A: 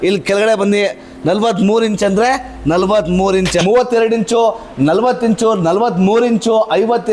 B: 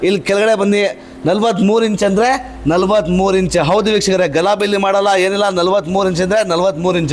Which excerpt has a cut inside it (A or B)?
A